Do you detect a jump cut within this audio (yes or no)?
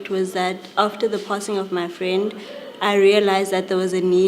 yes